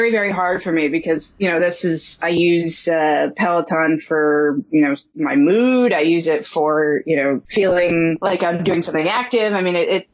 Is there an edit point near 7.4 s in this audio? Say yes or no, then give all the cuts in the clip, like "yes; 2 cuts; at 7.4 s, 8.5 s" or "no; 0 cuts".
yes; 2 cuts; at 7.4 s, 8.2 s